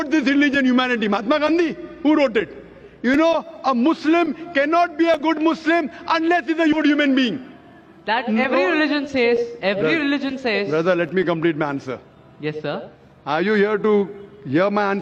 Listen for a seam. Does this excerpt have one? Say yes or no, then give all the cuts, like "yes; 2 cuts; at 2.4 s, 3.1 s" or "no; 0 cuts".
no; 0 cuts